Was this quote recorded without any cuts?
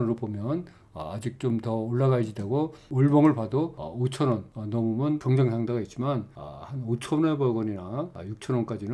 no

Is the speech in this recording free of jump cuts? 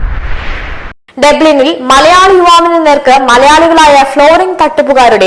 no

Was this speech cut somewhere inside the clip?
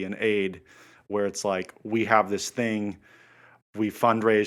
no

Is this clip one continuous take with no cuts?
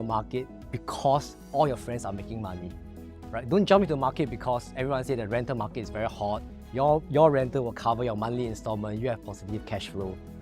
yes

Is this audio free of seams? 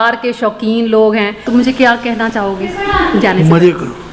no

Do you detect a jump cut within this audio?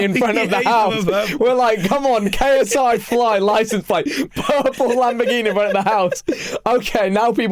no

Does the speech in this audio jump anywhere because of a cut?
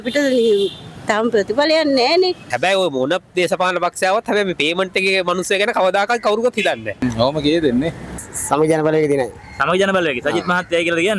yes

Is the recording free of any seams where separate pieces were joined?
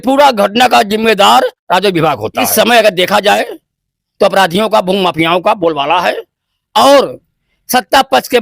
no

